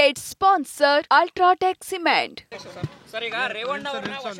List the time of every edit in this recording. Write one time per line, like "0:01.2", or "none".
0:02.5